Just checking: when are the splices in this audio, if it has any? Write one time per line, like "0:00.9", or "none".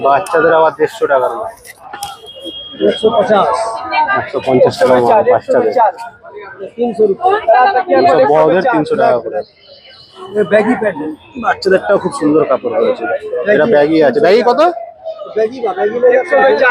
none